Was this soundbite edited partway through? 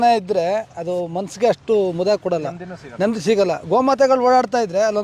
no; 0 cuts

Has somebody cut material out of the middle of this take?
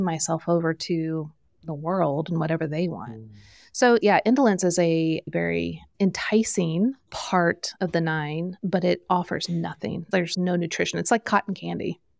yes; 3 cuts; at 4.0 s, 7.7 s, 8.5 s

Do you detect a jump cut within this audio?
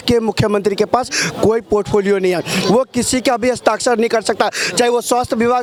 no; 0 cuts

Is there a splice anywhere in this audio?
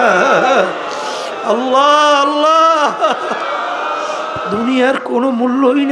yes; 1 cut; at 4.4 s

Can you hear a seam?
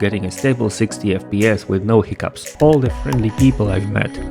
yes; 1 cut; at 2.5 s

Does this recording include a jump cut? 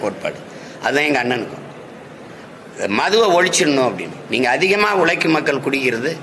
no; 0 cuts

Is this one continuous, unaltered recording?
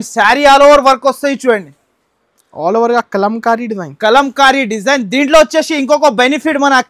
yes; 0 cuts

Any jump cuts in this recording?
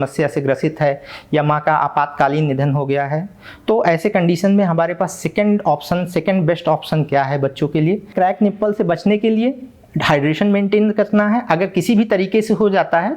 yes; 1 cut; at 8.1 s

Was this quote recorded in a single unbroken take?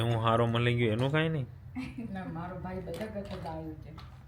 yes; 0 cuts

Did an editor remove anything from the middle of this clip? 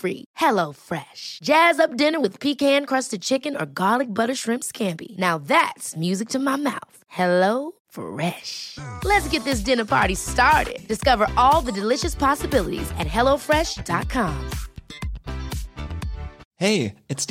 yes; 1 cut; at 16.4 s

